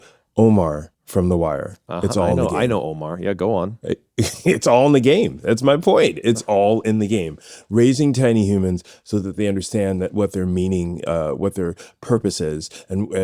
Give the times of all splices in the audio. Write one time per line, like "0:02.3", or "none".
0:00.9